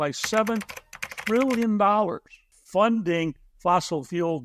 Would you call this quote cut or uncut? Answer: uncut